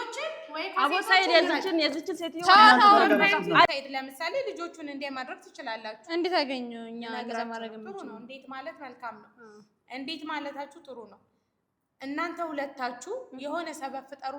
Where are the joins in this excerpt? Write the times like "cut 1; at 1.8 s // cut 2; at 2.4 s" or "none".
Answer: cut 1; at 3.7 s